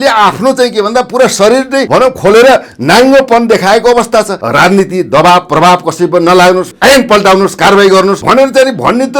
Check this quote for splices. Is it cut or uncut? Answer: cut